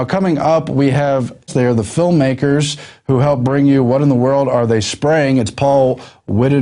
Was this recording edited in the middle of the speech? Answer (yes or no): yes